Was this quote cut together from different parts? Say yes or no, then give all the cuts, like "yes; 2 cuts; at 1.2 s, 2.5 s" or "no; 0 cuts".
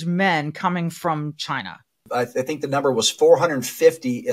yes; 1 cut; at 2.1 s